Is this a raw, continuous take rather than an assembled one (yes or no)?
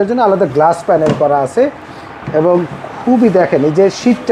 yes